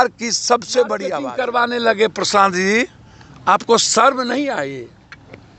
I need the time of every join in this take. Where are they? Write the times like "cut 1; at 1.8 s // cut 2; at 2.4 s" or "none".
cut 1; at 1.2 s

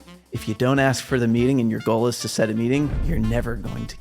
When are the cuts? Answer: cut 1; at 3.0 s

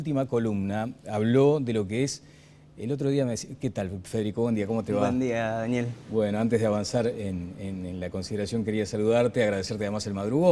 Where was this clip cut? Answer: none

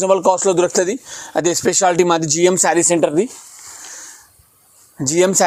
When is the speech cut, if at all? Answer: none

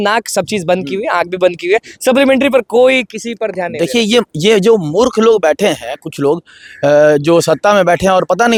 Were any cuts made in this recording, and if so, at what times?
none

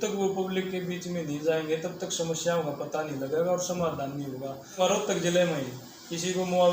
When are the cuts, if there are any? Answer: cut 1; at 4.8 s

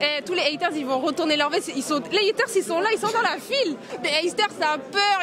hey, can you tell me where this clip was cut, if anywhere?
none

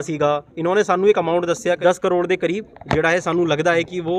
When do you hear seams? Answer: cut 1; at 1.8 s

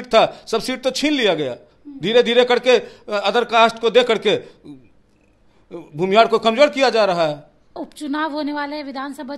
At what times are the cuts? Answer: cut 1; at 7.8 s

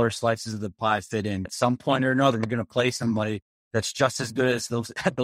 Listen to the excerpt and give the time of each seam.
cut 1; at 1.5 s

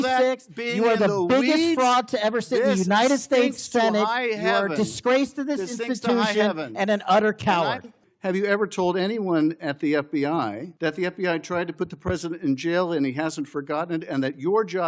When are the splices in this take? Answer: cut 1; at 8.0 s // cut 2; at 10.7 s

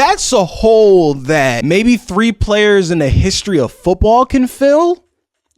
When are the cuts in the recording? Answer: cut 1; at 1.6 s

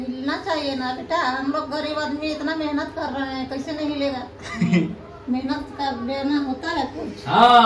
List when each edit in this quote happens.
none

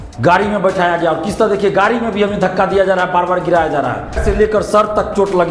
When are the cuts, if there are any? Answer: cut 1; at 4.2 s

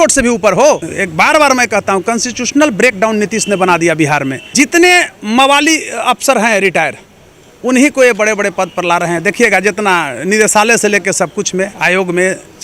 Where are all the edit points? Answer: cut 1; at 1.0 s // cut 2; at 4.4 s

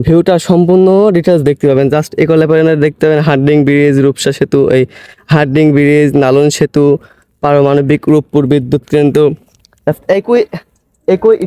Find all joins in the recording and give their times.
none

